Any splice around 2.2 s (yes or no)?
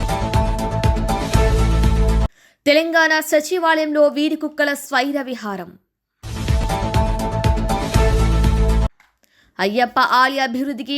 yes